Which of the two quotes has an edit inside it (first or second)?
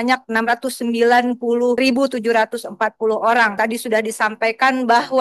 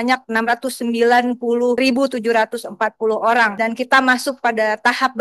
first